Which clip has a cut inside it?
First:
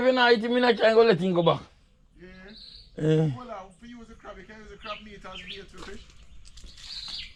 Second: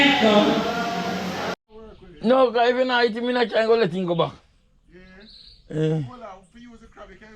second; 1 cut; at 1.5 s

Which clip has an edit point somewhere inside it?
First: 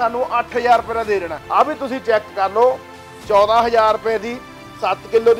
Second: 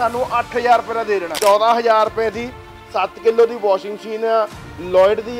second; 1 cut; at 1.3 s

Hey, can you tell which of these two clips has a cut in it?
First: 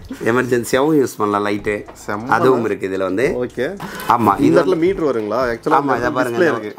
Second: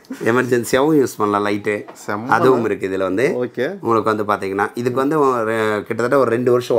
first; 1 cut; at 3.8 s

